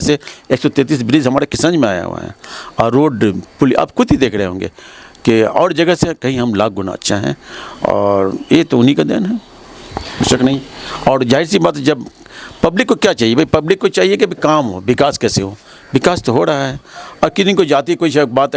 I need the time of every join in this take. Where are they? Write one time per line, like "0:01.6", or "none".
none